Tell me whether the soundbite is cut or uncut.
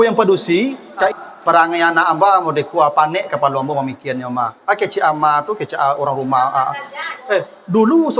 cut